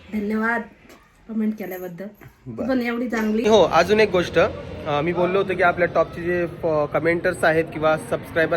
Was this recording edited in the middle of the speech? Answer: yes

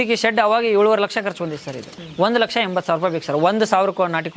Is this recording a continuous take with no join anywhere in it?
no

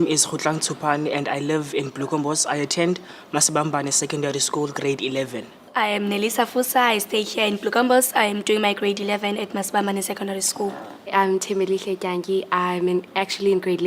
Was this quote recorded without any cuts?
no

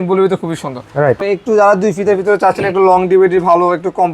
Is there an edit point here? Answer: yes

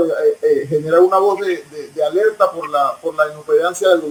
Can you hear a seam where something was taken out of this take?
no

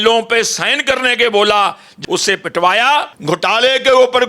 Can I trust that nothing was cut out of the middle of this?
no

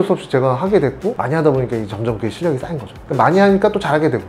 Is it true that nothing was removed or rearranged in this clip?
no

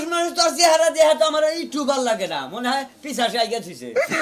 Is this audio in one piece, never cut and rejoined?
yes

